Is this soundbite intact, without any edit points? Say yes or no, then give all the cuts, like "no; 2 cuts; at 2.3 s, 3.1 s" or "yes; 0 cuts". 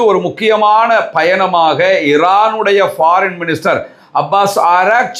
yes; 0 cuts